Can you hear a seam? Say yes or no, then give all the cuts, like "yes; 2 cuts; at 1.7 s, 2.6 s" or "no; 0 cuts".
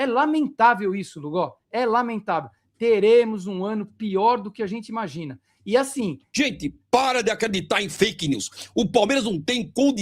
yes; 1 cut; at 6.2 s